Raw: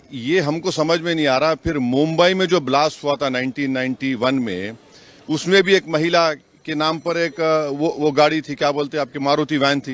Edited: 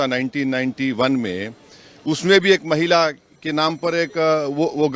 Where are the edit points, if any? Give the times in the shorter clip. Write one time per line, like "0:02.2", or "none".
none